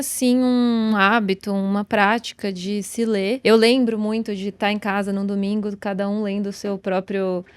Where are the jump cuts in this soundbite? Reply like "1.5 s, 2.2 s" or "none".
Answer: 0.9 s, 3.4 s